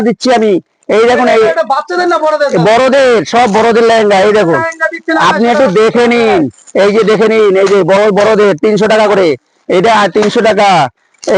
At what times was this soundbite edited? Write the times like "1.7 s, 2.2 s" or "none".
none